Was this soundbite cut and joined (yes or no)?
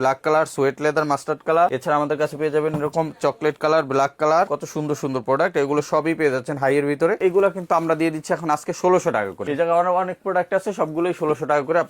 yes